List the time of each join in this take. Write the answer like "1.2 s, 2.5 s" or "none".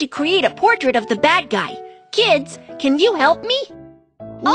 none